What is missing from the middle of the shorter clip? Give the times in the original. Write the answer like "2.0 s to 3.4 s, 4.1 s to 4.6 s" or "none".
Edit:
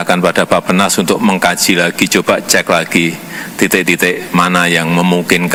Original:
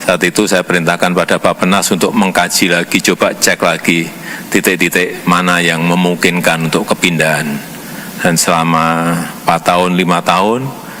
none